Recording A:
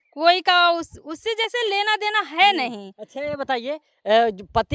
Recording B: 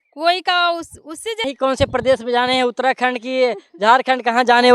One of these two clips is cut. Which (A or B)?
B